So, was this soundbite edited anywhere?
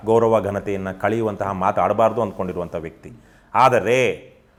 no; 0 cuts

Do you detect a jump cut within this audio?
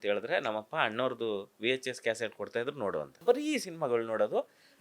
yes; 1 cut; at 3.2 s

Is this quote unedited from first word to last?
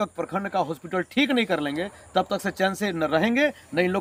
yes; 0 cuts

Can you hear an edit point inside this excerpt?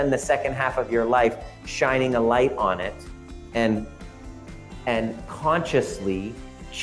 no; 0 cuts

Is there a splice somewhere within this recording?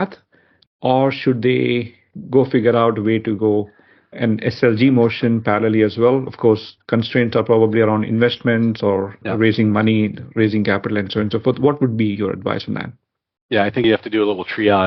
no; 0 cuts

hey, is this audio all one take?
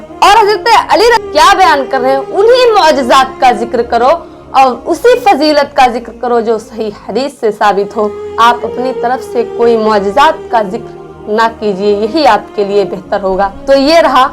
no; 1 cut; at 1.2 s

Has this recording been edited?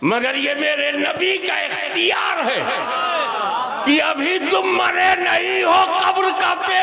no; 0 cuts

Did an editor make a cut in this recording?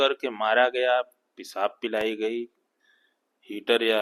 no; 0 cuts

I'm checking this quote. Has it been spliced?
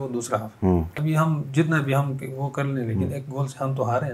yes; 1 cut; at 1.0 s

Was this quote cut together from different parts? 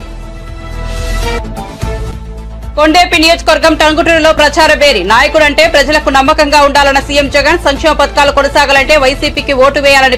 no; 0 cuts

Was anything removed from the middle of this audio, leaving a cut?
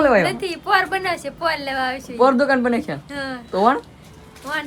no; 0 cuts

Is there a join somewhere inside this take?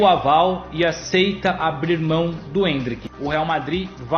yes; 1 cut; at 3.1 s

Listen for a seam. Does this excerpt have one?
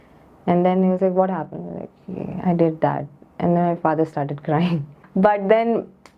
yes; 1 cut; at 5.0 s

